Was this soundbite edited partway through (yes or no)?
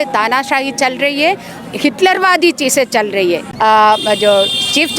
yes